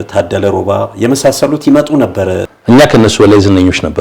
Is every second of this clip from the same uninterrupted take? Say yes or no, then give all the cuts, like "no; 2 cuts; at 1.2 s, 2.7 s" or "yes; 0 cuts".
no; 1 cut; at 2.5 s